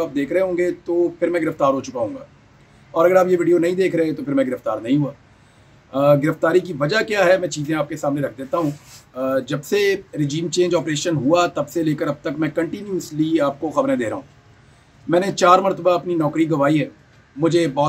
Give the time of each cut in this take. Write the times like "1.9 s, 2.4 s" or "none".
none

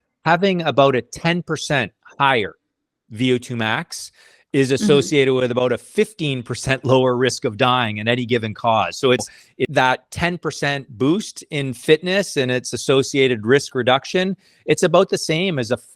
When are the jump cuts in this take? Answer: 9.7 s

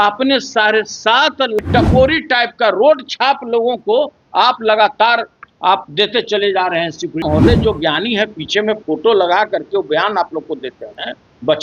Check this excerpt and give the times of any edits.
1.6 s, 7.2 s

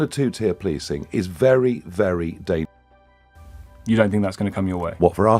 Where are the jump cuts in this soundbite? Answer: 2.9 s

